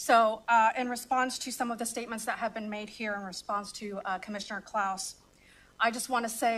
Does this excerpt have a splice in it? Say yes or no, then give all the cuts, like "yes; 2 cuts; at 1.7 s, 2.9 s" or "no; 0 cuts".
no; 0 cuts